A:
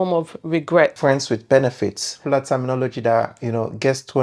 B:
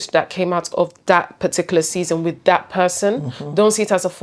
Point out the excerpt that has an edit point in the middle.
A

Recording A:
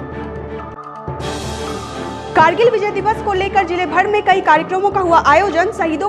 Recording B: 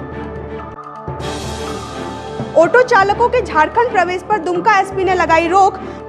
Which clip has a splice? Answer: A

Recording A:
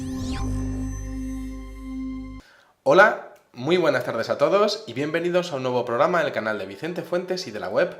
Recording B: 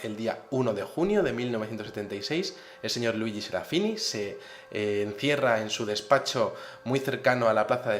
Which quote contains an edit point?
A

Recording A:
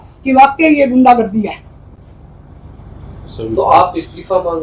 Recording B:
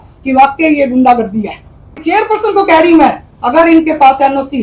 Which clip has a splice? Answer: B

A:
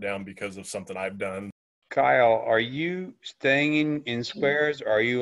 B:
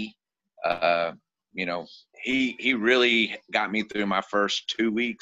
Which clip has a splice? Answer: A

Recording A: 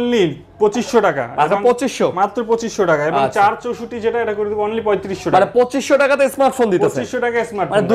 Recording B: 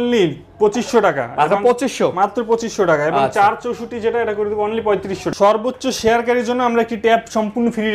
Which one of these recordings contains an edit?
B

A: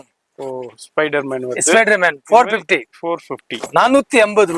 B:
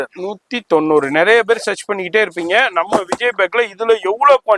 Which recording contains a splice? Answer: A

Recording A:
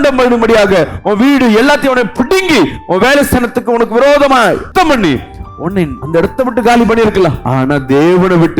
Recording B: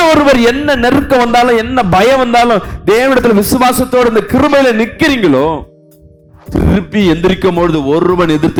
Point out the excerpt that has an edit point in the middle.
A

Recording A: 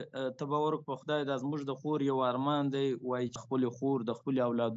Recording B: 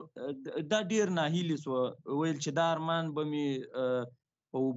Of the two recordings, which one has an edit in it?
A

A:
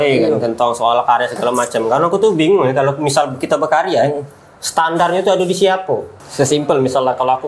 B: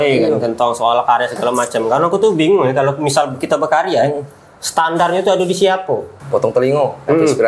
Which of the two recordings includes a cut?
B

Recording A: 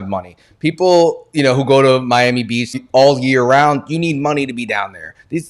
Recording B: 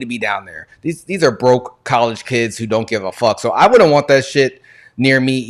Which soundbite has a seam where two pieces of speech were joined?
A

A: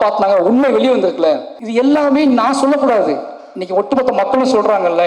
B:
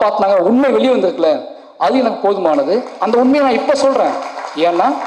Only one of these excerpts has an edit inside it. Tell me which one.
A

